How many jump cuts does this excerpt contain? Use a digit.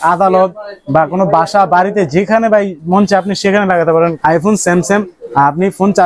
1